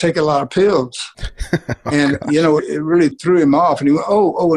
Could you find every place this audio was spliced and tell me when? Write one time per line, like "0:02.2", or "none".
0:02.9